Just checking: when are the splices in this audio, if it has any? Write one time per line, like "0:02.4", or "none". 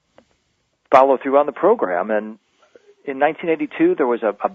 0:02.8